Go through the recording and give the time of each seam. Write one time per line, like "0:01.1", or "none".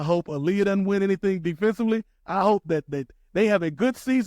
0:02.2